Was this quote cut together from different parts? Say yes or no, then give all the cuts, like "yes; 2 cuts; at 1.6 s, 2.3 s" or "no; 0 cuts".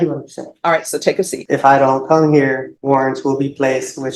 yes; 2 cuts; at 1.4 s, 2.7 s